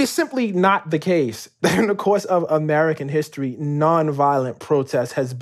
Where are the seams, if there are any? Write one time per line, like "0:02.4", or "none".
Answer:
0:01.4